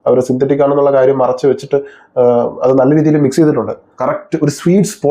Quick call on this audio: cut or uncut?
cut